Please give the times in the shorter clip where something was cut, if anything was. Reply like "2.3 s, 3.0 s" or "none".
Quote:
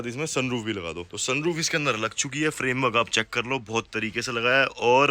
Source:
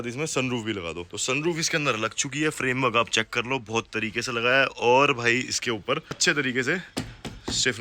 none